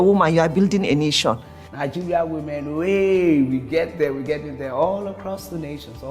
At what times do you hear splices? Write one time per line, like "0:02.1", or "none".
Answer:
0:01.5